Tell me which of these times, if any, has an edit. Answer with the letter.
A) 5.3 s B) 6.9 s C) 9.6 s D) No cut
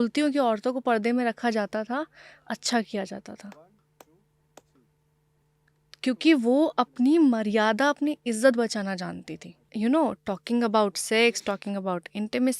C